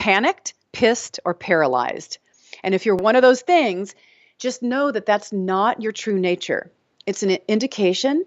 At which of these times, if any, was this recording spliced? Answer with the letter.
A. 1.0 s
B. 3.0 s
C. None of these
B